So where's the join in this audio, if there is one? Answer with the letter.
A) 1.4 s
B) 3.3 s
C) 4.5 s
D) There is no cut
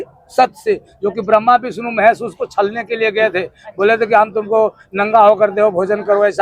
D